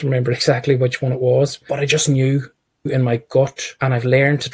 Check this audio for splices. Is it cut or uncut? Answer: cut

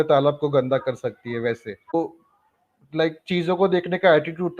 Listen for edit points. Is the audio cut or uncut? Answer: cut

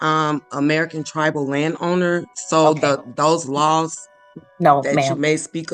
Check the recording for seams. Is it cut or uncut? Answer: uncut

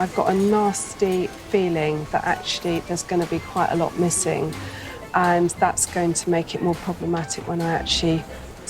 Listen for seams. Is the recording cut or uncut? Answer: uncut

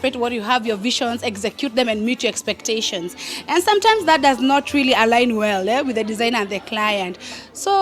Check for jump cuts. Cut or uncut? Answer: uncut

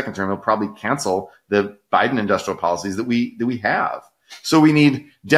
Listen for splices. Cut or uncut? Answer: uncut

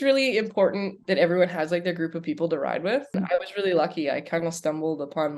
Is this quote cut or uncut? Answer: cut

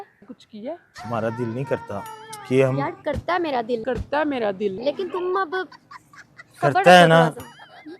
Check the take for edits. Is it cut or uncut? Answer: cut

